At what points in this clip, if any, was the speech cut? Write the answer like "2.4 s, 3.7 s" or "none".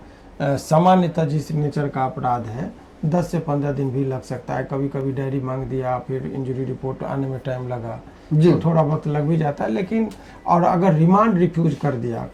none